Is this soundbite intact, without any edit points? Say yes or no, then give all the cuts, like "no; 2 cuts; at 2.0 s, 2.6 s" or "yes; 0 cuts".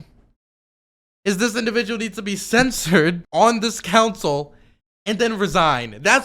no; 1 cut; at 3.2 s